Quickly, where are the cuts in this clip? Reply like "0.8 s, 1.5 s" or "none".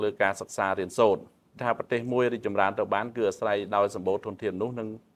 1.5 s

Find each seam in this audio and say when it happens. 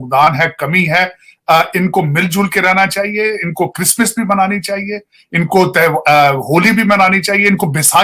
none

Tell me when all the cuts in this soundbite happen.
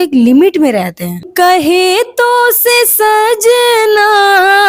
1.3 s

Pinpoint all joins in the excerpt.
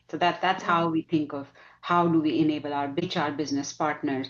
3.0 s

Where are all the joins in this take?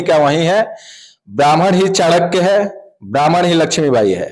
none

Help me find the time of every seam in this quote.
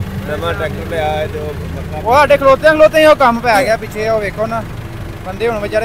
none

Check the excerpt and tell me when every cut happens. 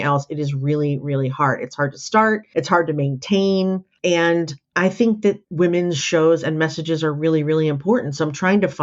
4.1 s, 5.4 s

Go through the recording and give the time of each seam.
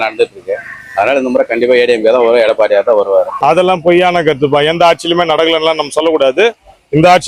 3.3 s

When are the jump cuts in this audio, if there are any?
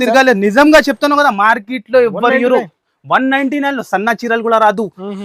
none

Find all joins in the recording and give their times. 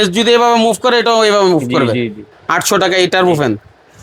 2.3 s

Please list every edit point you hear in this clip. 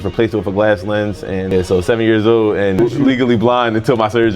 1.5 s

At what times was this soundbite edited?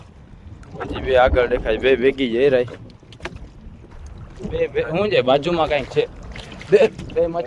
3.9 s

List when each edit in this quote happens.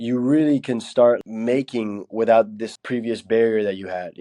1.2 s, 2.6 s

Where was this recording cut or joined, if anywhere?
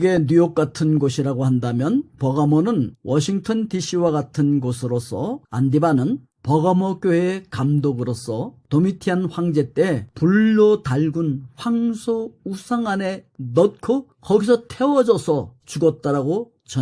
5.4 s

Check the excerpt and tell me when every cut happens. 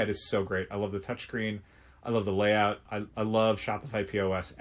2.9 s

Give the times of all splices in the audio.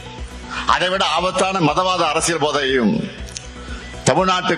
none

